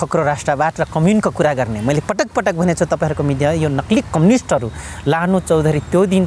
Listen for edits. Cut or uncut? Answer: uncut